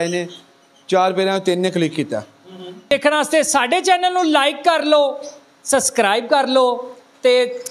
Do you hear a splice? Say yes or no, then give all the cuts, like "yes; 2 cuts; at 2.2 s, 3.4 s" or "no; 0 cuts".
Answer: yes; 1 cut; at 2.9 s